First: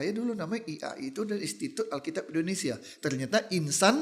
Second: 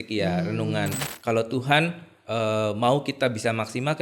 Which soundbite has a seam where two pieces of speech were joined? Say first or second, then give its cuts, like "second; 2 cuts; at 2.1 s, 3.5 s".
second; 1 cut; at 1.1 s